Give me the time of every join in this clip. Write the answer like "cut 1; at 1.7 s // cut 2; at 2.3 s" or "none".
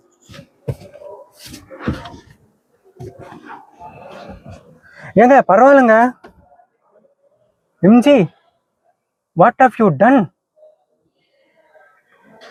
none

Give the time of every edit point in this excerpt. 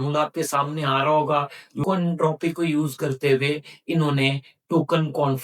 cut 1; at 1.8 s

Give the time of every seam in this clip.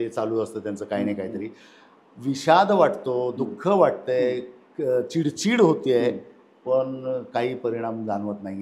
none

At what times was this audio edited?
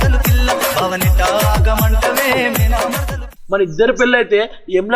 cut 1; at 3.3 s

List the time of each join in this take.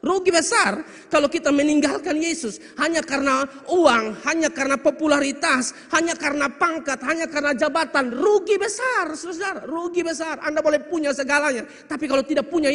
none

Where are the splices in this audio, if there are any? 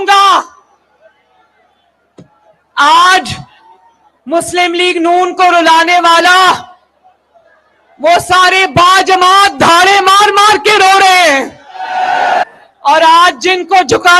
cut 1; at 12.5 s

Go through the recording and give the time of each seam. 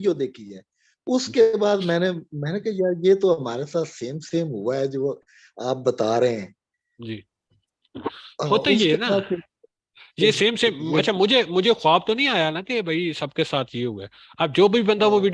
none

